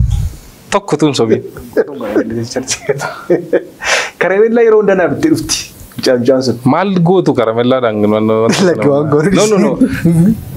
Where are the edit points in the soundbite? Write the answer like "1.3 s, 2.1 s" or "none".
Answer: 2.3 s